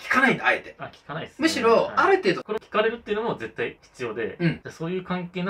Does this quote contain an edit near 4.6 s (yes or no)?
yes